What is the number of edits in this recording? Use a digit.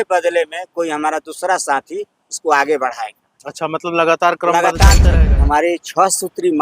1